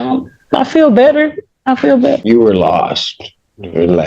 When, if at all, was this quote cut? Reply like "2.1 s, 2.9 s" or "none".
2.2 s